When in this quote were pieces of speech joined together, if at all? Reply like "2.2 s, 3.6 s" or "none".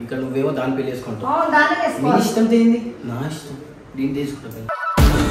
none